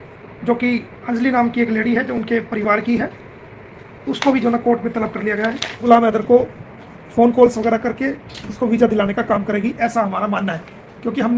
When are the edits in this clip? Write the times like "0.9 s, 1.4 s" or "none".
5.8 s